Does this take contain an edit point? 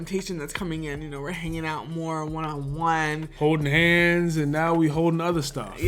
no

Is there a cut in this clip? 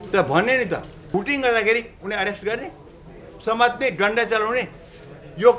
yes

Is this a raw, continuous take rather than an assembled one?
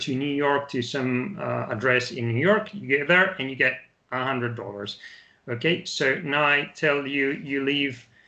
yes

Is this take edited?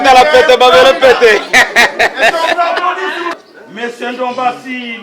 yes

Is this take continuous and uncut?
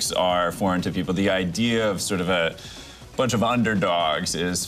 yes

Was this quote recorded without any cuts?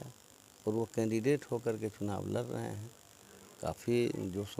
yes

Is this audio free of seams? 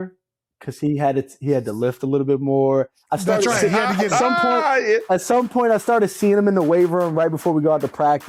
yes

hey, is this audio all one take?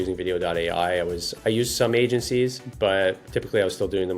no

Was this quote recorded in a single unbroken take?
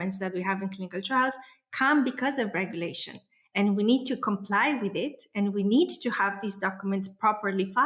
yes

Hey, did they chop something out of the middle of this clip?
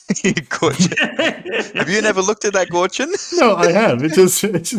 no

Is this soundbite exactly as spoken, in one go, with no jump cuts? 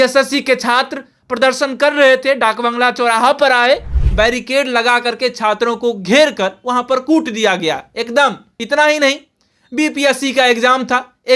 no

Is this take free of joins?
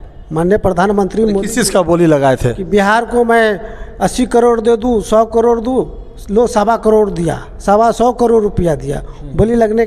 yes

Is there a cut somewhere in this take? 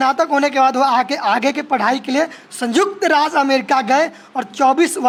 no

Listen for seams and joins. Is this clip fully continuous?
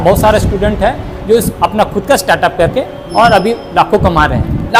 yes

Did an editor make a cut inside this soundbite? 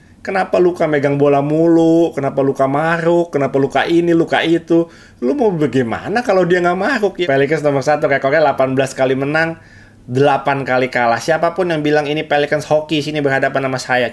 yes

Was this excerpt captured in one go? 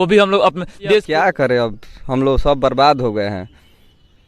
no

